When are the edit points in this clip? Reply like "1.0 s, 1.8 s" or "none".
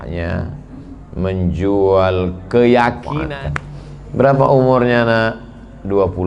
3.1 s